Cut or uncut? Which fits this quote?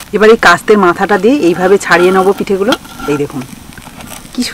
uncut